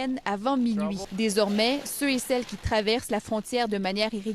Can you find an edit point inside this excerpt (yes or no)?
yes